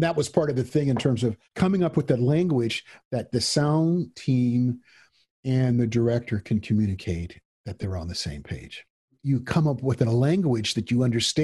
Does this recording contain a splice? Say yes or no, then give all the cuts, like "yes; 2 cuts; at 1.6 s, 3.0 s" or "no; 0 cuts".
yes; 2 cuts; at 1.4 s, 9.2 s